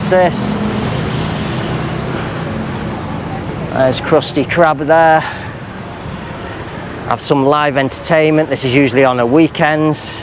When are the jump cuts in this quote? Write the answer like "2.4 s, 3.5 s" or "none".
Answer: none